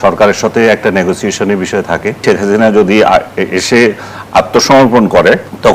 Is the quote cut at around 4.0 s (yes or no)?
no